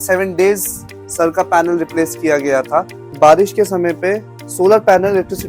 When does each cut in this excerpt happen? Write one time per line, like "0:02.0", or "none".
0:03.1